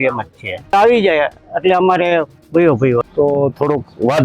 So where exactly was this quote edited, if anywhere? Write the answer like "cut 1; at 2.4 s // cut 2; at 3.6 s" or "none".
cut 1; at 0.7 s // cut 2; at 3.0 s